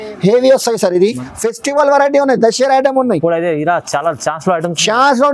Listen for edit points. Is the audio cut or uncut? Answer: cut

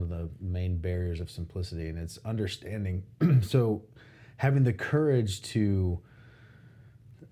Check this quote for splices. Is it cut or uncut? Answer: uncut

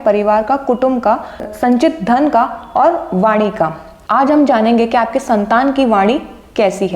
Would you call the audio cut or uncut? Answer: cut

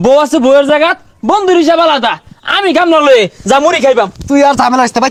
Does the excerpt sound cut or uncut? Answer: uncut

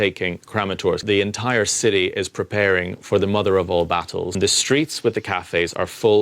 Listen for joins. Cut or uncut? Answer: cut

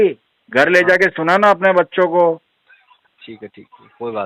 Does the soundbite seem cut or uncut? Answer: uncut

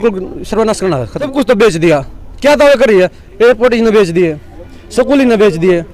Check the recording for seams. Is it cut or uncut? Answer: cut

